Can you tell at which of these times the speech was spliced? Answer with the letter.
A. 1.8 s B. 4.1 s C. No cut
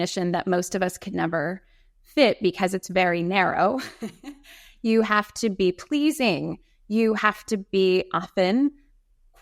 C